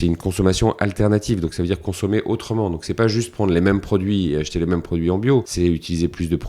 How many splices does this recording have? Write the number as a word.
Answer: one